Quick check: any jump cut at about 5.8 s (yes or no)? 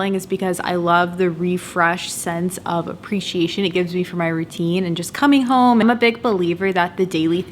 yes